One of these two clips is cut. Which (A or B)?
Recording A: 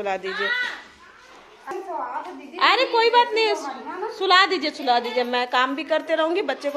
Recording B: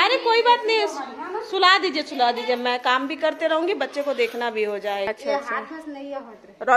B